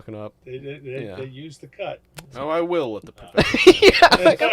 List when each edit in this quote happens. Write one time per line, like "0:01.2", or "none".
0:02.2